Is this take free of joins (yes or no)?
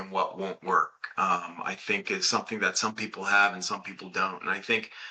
yes